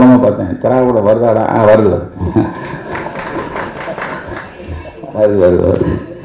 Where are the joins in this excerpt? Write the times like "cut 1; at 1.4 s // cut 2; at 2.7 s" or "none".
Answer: none